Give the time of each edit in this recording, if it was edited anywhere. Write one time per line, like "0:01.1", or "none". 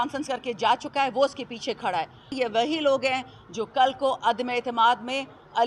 0:02.3